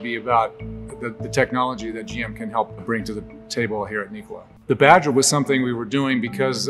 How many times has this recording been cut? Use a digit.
1